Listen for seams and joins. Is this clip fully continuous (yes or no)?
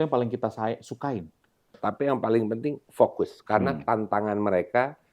no